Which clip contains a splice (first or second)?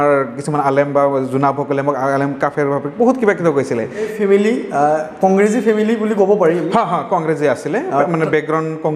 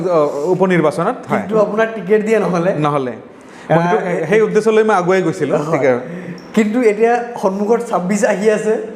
first